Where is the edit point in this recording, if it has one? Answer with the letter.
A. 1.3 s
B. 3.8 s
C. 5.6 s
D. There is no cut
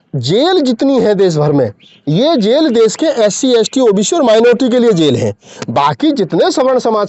D